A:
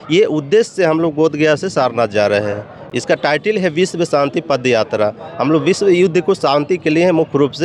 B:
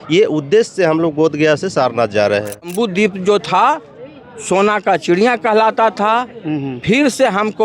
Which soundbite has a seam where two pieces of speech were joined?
B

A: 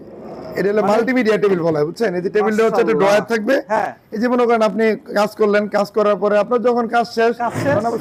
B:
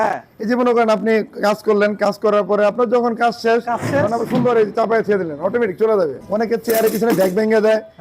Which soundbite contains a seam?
B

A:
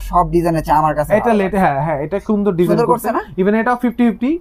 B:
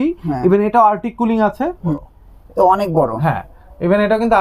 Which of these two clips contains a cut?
B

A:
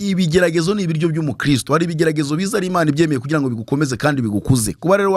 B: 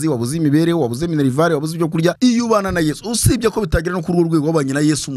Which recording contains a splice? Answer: B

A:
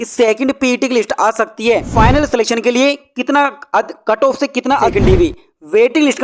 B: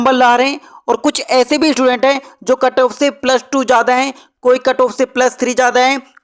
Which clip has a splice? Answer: A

